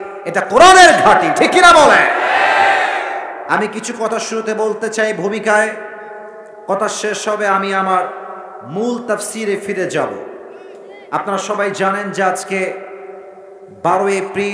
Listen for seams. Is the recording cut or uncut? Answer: uncut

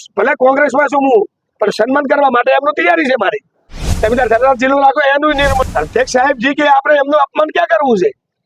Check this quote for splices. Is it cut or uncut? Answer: cut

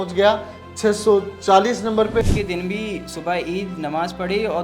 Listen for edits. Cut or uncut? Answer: cut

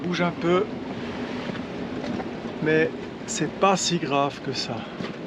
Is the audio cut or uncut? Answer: uncut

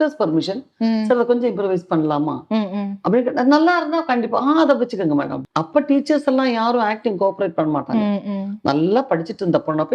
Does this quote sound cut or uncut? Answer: cut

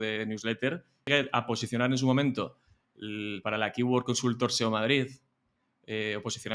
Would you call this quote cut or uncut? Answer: cut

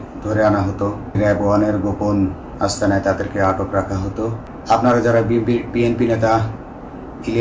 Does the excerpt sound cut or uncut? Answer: cut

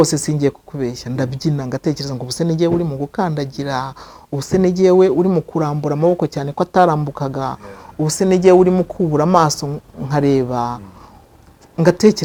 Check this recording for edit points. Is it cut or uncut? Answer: uncut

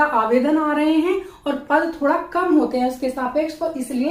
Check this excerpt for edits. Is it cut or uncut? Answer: uncut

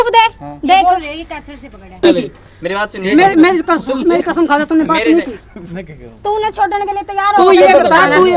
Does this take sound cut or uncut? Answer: cut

